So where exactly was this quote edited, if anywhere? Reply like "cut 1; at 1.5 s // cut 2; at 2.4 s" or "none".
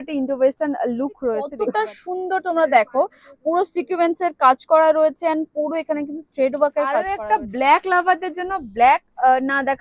cut 1; at 1.5 s // cut 2; at 7.0 s